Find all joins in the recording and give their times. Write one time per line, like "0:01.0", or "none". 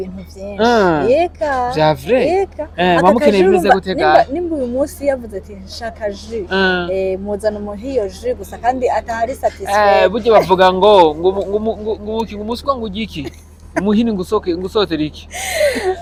none